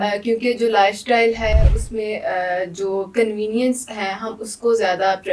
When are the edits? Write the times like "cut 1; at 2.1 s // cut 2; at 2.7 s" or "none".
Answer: none

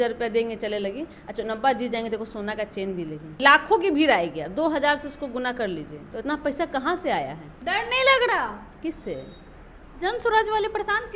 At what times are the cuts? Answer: cut 1; at 3.3 s // cut 2; at 7.5 s

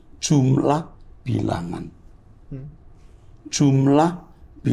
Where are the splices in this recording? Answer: none

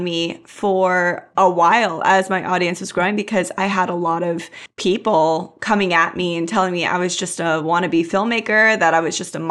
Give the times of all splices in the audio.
none

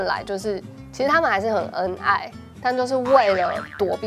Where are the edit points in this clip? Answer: none

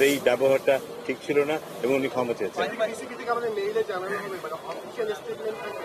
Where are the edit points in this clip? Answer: none

